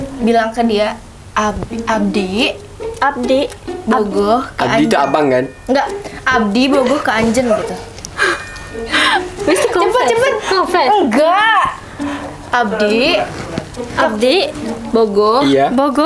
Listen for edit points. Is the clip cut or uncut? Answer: uncut